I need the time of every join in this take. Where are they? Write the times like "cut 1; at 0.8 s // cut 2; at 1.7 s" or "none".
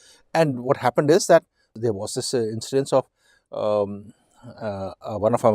cut 1; at 1.7 s